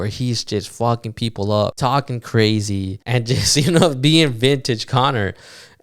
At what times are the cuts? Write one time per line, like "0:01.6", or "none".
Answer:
0:01.8
0:02.9